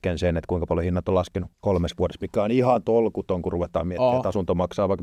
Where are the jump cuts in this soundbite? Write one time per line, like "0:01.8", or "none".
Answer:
0:01.5